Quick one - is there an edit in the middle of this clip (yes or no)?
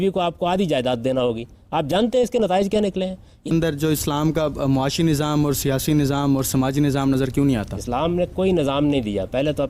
yes